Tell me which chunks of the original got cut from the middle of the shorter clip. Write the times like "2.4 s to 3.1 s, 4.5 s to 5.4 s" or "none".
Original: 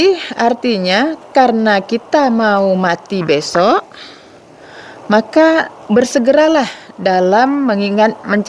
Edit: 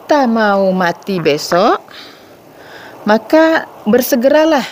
none